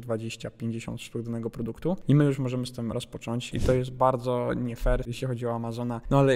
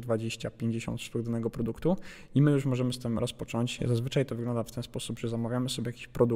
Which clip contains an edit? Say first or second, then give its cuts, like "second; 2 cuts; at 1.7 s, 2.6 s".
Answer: first; 2 cuts; at 2.0 s, 3.5 s